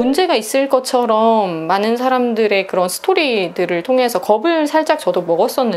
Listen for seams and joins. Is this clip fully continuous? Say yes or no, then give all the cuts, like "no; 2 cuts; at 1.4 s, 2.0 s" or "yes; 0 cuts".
yes; 0 cuts